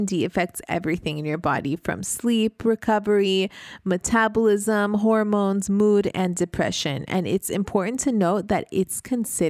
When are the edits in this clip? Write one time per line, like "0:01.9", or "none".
none